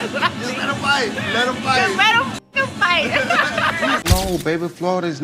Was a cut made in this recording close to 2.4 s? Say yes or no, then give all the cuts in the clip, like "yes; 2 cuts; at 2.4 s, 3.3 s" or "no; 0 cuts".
no; 1 cut; at 4.0 s